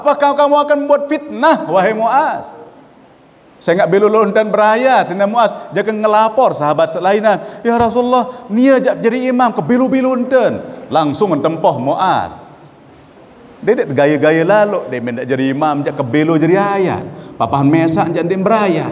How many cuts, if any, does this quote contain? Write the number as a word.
zero